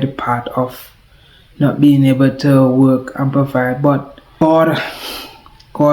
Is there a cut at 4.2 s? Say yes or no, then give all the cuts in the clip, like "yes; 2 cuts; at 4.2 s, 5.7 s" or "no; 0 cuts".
yes; 1 cut; at 4.2 s